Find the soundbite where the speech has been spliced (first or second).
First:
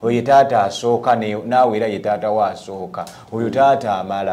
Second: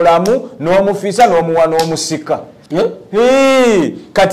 second